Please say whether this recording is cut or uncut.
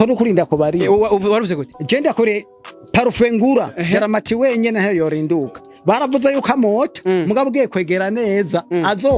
uncut